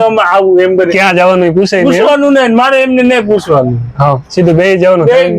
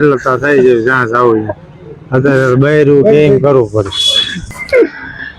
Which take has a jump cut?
second; 1 cut; at 4.5 s

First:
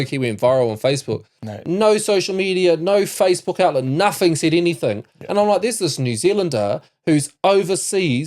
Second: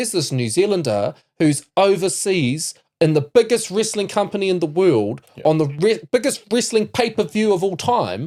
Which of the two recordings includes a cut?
first; 1 cut; at 1.5 s

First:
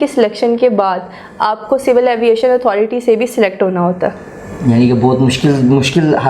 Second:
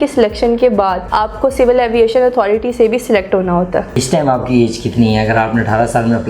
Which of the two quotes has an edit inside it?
second; 2 cuts; at 1.0 s, 4.0 s

